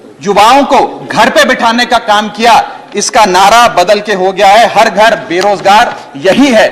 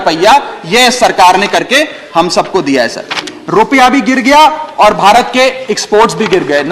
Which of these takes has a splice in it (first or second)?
second